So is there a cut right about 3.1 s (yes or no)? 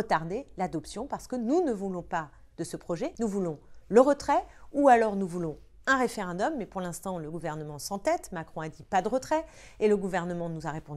yes